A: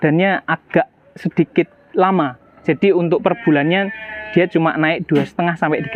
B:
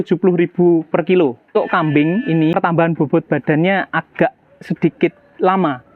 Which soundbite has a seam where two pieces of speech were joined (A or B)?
B